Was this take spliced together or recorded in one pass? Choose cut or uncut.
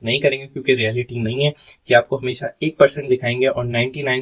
uncut